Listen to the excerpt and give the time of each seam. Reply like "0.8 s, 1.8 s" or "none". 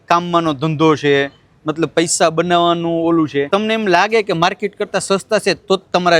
3.5 s